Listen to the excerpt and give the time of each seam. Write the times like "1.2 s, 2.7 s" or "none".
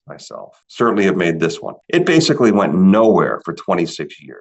1.7 s